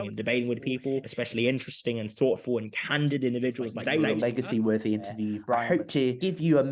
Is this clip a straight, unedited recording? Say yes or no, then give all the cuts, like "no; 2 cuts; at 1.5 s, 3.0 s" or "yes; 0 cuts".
no; 3 cuts; at 1.1 s, 4.0 s, 5.7 s